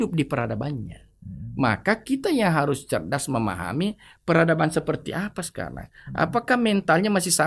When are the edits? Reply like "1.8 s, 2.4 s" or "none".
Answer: none